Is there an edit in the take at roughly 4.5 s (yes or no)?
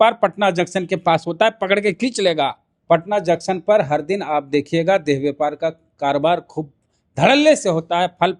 no